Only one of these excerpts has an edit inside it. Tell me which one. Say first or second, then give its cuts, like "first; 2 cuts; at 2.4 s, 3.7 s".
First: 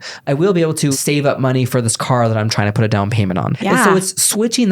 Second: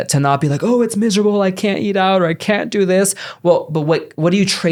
first; 2 cuts; at 1.0 s, 3.5 s